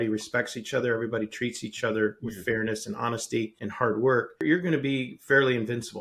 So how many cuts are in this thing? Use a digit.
2